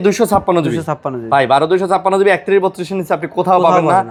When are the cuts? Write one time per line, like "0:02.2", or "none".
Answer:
none